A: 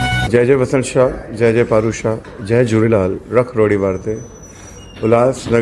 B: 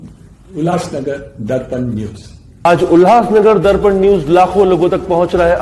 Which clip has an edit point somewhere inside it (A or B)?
B